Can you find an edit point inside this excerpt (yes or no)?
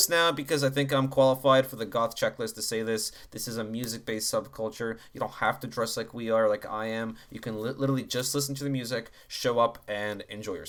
no